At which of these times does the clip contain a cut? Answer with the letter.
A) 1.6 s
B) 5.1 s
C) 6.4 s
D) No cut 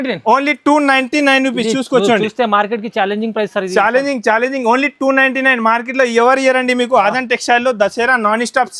D